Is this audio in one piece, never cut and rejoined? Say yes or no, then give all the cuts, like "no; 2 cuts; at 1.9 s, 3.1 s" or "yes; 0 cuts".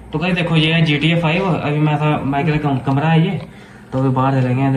yes; 0 cuts